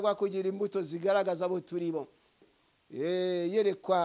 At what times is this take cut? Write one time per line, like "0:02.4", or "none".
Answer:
0:02.5